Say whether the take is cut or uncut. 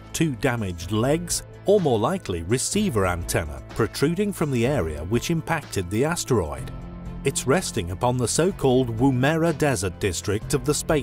cut